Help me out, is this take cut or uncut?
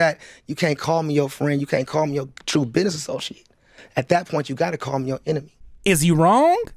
uncut